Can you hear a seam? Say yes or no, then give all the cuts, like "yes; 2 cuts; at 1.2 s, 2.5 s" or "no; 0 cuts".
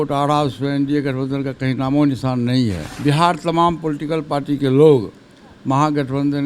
yes; 1 cut; at 2.9 s